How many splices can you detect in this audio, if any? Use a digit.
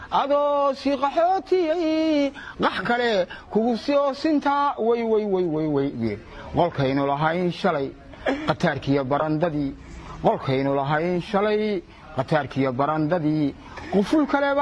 0